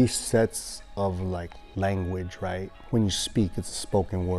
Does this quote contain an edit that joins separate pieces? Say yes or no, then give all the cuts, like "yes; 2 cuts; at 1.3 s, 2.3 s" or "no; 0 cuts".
yes; 1 cut; at 2.8 s